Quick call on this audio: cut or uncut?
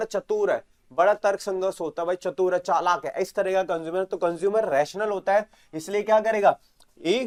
uncut